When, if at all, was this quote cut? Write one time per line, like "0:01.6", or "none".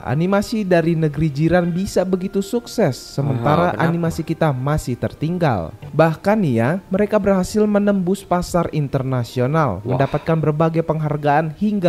0:05.8